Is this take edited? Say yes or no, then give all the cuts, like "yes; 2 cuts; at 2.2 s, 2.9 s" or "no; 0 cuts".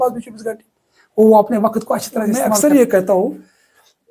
yes; 1 cut; at 2.6 s